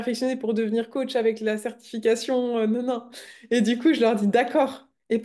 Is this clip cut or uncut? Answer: uncut